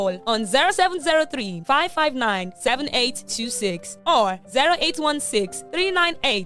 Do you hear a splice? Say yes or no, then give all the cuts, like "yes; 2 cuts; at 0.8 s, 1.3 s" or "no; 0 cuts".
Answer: no; 0 cuts